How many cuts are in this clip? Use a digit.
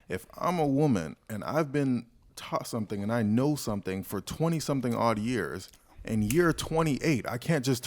0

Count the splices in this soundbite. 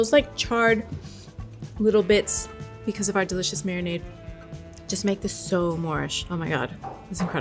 1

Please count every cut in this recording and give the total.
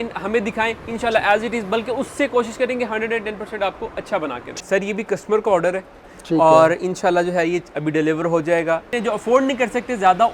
2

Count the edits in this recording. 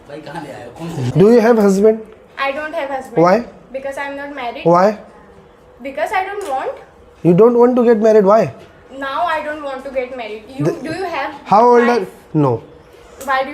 1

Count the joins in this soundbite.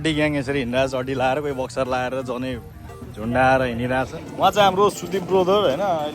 1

